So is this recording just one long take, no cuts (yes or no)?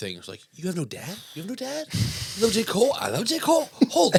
yes